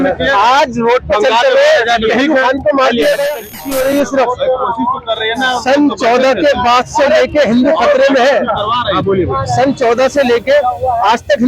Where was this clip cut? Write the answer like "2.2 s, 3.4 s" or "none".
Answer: 3.4 s